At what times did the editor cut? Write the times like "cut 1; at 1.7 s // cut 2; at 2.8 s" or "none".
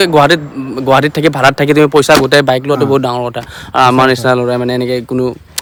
none